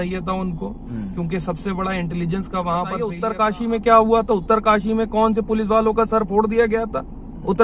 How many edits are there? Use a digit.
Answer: 1